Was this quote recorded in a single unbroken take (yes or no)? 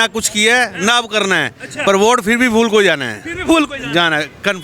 yes